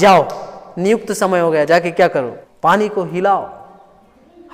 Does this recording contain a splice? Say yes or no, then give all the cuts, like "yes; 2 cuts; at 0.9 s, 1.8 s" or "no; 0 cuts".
yes; 1 cut; at 2.4 s